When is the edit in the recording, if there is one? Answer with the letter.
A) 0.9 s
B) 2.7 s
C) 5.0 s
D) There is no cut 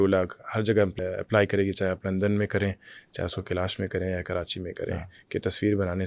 A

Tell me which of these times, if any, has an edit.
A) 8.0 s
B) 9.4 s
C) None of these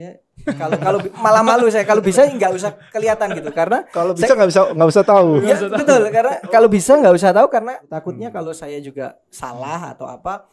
A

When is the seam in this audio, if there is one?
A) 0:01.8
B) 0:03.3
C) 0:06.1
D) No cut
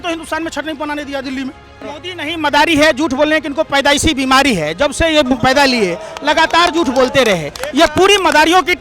A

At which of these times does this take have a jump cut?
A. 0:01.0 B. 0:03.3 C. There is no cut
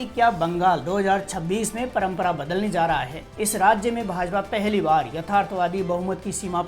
B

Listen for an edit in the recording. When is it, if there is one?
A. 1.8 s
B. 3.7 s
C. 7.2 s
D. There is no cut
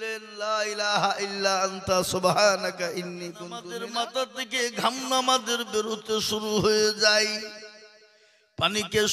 B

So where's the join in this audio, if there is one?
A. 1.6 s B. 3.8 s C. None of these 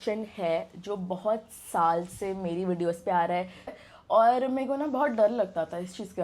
B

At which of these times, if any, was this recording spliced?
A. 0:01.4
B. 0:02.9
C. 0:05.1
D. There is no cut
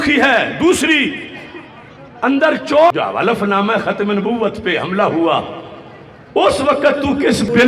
B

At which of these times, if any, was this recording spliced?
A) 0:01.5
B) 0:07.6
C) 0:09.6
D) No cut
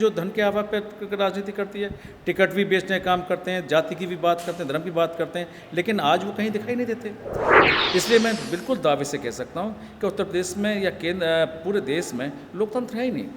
B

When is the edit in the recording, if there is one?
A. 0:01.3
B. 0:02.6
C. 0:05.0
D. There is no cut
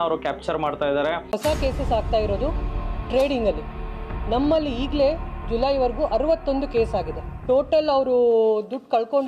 A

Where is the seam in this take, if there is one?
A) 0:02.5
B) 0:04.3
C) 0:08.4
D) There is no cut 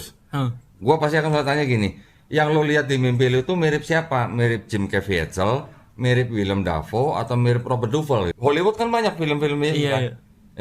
C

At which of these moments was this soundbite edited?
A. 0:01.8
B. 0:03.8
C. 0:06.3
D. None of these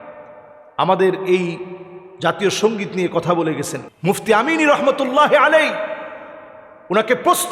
B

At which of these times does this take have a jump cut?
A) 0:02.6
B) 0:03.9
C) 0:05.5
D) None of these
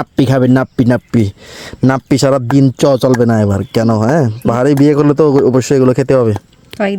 D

